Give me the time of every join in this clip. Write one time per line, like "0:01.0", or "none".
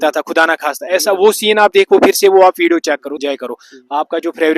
0:03.1